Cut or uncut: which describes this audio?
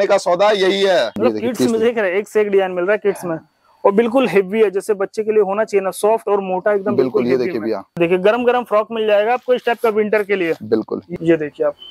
cut